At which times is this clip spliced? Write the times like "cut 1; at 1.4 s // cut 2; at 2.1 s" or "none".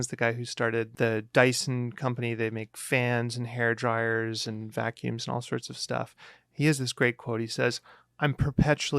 cut 1; at 0.9 s